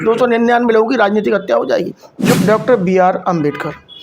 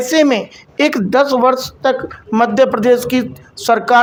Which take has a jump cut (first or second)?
first